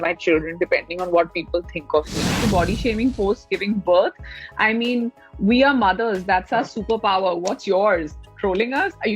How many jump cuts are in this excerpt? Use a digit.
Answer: 1